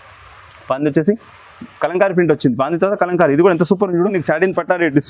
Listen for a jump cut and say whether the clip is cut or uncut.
cut